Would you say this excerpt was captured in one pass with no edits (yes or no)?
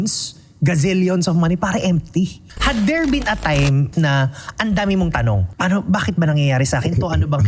no